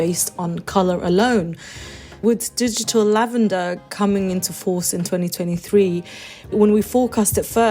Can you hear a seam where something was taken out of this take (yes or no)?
yes